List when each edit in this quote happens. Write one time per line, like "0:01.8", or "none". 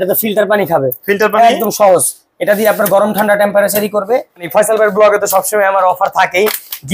0:04.5